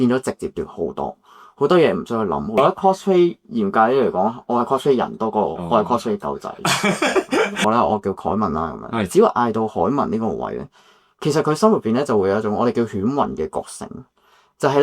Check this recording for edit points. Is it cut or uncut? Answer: cut